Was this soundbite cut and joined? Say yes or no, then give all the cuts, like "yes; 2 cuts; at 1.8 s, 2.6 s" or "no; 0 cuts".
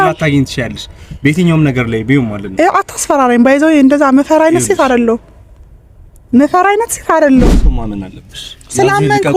yes; 1 cut; at 7.6 s